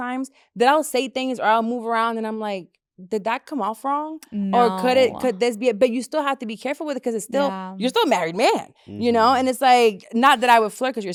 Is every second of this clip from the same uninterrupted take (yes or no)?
yes